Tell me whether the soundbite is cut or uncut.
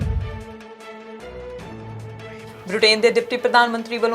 cut